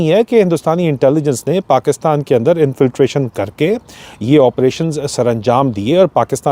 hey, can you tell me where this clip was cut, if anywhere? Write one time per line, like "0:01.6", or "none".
none